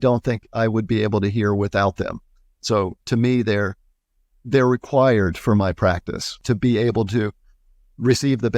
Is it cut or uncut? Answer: cut